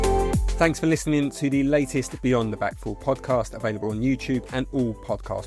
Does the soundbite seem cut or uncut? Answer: uncut